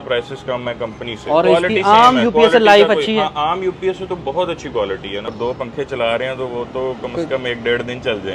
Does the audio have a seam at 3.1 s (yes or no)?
no